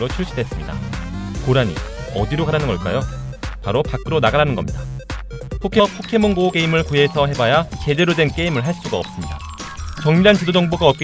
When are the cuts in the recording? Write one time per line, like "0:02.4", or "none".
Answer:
none